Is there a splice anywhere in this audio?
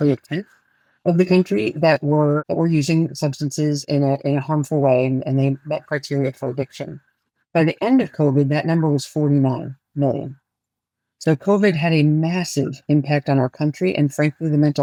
no; 0 cuts

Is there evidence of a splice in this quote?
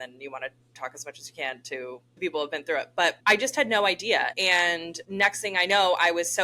yes; 4 cuts; at 0.8 s, 2.2 s, 3.2 s, 4.5 s

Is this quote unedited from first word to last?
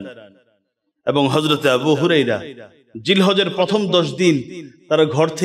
yes; 0 cuts

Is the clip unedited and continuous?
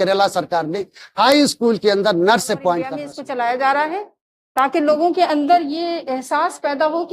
no; 1 cut; at 3.1 s

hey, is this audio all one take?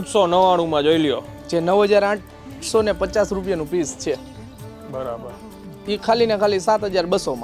no; 1 cut; at 1.3 s

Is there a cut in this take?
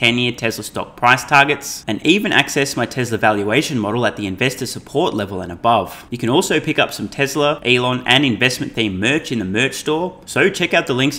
yes; 3 cuts; at 6.0 s, 7.6 s, 10.2 s

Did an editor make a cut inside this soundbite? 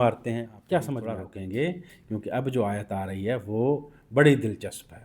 yes; 1 cut; at 1.2 s

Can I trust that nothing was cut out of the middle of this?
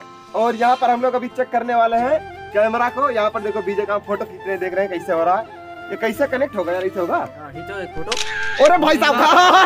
yes; 0 cuts

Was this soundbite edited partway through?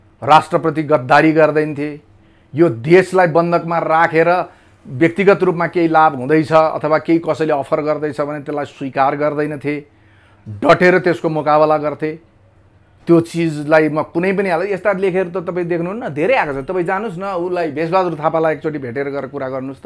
no; 0 cuts

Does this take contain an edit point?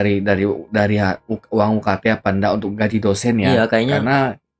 no; 0 cuts

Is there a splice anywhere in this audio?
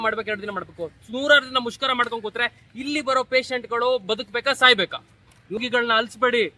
yes; 1 cut; at 5.6 s

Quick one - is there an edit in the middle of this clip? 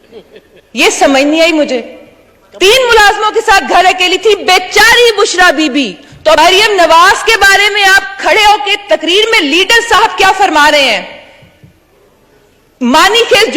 yes; 1 cut; at 6.4 s

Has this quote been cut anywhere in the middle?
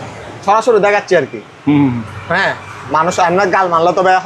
no; 0 cuts

